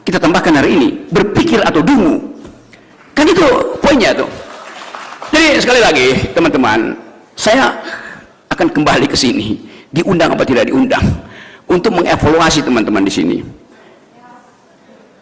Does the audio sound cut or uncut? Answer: uncut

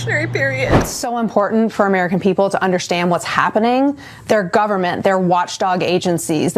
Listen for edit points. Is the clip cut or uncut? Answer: cut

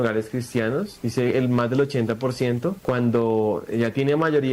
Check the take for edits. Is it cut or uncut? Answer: cut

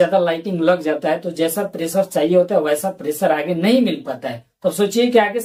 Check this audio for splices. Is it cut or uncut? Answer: uncut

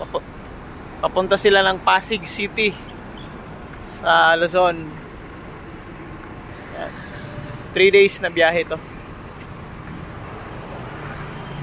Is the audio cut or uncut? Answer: uncut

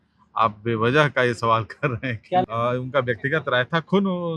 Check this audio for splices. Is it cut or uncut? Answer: cut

